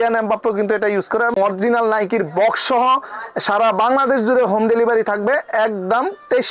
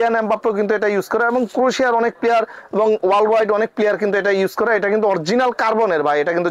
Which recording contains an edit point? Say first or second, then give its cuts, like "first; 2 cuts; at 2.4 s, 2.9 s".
first; 1 cut; at 1.3 s